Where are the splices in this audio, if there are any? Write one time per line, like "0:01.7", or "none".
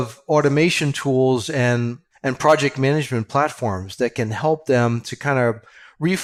none